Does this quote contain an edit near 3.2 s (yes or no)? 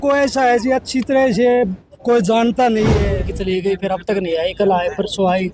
yes